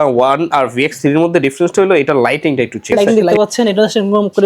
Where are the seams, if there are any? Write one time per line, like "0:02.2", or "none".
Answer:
0:02.9